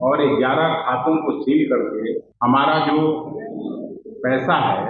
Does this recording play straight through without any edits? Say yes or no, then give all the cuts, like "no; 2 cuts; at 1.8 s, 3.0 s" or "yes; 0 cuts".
no; 1 cut; at 2.3 s